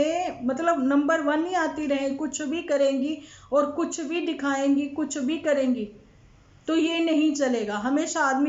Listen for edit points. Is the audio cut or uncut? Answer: uncut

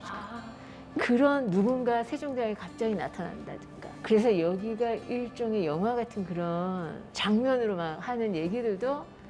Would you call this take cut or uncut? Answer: uncut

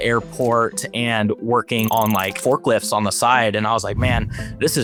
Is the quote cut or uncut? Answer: uncut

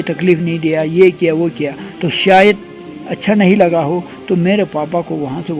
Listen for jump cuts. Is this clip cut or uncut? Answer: uncut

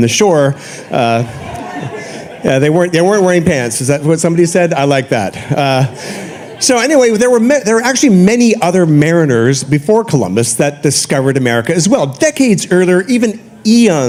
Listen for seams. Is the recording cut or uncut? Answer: uncut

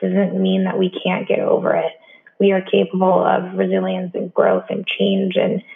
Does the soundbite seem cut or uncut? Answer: uncut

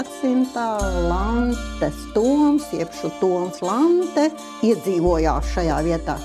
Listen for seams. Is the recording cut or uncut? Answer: cut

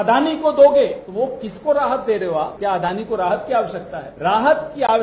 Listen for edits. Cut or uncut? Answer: cut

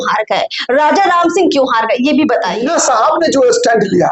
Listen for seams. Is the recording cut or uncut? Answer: cut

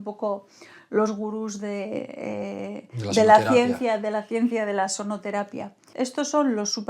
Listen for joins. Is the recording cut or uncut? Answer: cut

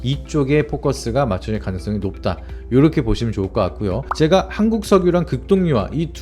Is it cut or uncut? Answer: cut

